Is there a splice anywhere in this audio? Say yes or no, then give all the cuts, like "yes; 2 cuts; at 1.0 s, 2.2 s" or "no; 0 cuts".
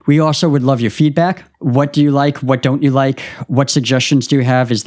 no; 0 cuts